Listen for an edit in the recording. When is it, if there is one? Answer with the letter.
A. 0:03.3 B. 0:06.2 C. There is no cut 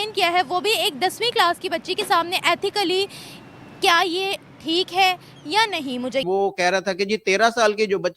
B